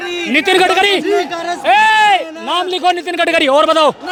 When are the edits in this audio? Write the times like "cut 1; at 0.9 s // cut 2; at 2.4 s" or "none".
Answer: none

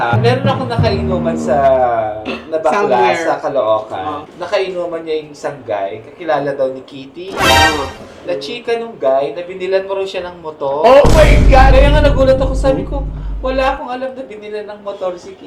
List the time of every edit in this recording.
none

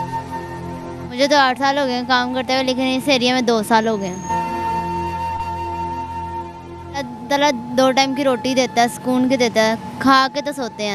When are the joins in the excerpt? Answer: cut 1; at 1.0 s // cut 2; at 7.1 s

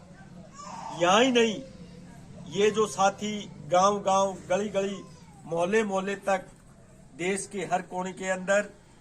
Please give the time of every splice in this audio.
none

